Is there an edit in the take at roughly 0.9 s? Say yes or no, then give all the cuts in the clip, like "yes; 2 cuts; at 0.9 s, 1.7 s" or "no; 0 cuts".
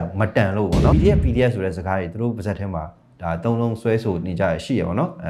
yes; 1 cut; at 0.9 s